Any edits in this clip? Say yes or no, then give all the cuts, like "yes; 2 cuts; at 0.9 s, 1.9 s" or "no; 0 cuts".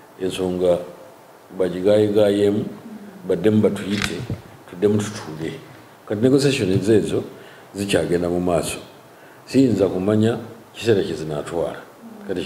no; 0 cuts